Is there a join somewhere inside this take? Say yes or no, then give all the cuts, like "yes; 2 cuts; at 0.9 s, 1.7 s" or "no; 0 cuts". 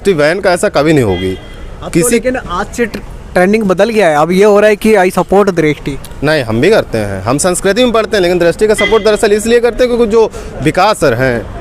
no; 0 cuts